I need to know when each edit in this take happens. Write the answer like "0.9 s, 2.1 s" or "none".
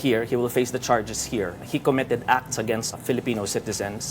1.6 s, 3.0 s